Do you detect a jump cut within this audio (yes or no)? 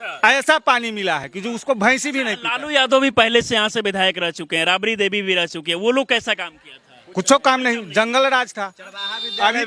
no